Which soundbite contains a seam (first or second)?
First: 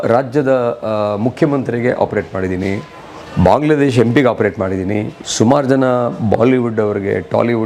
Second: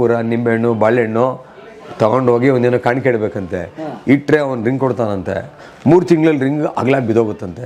first